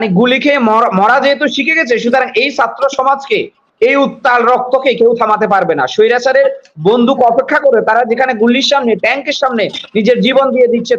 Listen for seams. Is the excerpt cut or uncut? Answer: uncut